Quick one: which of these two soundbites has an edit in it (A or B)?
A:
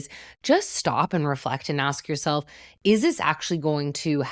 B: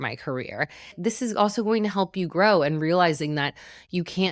B